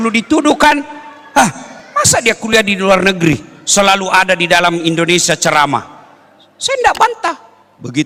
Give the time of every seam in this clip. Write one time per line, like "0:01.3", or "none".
none